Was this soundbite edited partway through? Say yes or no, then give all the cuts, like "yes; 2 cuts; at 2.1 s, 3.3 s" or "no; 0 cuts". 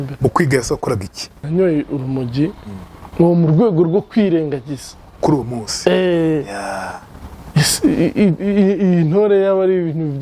yes; 1 cut; at 1.4 s